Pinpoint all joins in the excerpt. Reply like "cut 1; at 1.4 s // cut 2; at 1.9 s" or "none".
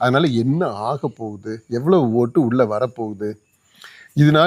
none